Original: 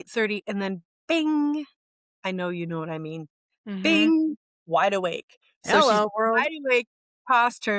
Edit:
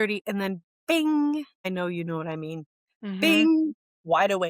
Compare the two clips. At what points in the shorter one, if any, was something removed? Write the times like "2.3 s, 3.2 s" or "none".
1.5 s

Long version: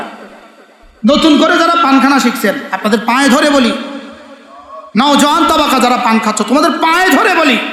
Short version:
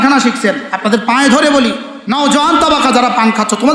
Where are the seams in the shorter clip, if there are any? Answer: 1.9 s

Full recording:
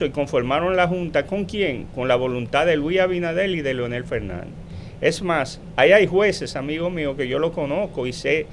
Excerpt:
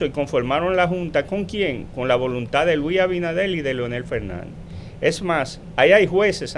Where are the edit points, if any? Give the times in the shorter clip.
none

